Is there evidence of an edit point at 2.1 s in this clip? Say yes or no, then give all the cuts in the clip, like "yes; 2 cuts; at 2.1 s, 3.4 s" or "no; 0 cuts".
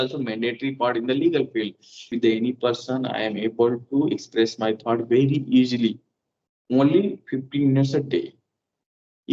yes; 1 cut; at 2.1 s